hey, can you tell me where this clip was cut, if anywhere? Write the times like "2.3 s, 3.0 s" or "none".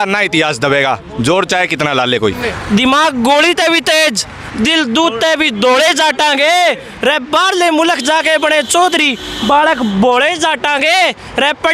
2.4 s